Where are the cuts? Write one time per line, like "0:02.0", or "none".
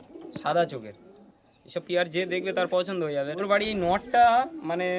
0:03.3